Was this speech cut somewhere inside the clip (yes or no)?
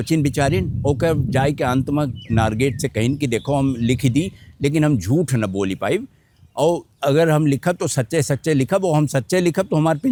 no